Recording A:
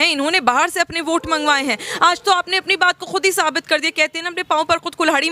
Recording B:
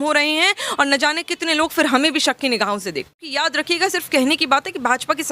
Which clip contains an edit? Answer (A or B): B